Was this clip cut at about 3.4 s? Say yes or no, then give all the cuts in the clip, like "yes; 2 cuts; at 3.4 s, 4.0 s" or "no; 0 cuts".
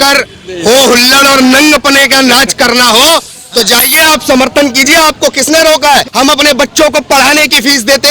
no; 1 cut; at 6.1 s